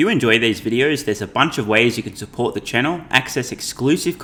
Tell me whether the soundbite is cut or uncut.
uncut